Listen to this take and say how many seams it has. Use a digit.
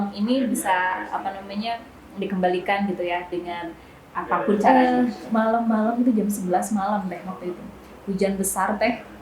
1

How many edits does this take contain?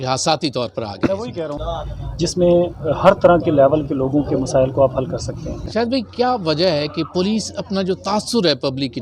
2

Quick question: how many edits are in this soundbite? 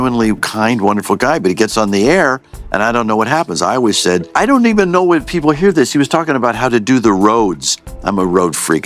1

